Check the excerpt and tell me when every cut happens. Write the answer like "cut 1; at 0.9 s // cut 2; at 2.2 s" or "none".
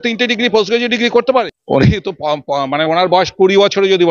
cut 1; at 1.6 s